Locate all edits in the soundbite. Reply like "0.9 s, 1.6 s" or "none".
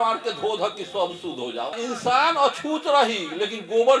1.8 s